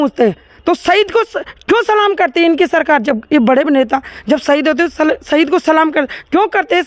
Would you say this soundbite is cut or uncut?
uncut